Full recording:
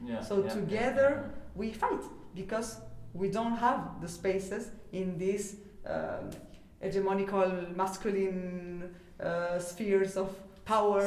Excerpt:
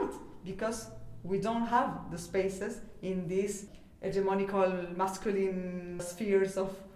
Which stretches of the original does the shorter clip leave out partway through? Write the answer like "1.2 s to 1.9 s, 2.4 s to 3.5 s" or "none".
5.7 s to 6.6 s, 8.9 s to 9.7 s